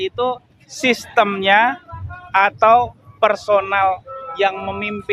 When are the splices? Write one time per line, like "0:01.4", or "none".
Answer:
none